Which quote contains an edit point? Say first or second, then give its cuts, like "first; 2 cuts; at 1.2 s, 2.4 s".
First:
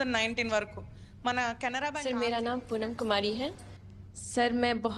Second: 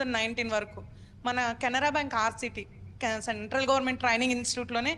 first; 1 cut; at 1.8 s